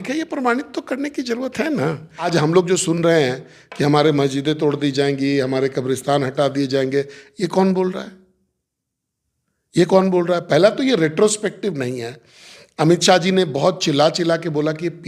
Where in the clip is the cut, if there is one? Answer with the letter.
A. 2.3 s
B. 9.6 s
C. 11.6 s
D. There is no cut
A